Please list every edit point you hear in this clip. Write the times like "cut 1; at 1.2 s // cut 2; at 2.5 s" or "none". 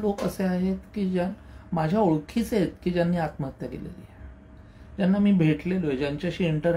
none